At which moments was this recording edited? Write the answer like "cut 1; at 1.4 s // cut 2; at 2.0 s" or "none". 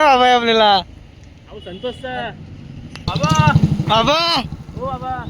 cut 1; at 3.1 s